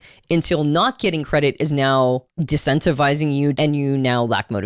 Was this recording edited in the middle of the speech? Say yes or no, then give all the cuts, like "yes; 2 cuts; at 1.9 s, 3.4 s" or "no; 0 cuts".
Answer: yes; 2 cuts; at 2.3 s, 3.5 s